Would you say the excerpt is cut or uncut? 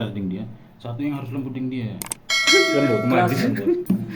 cut